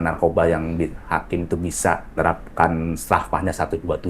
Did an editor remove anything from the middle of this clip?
yes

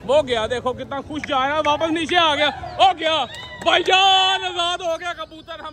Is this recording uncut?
yes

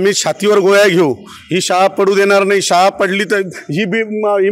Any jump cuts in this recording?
no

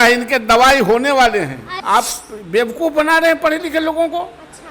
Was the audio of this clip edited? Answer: yes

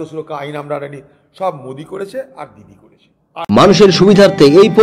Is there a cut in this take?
yes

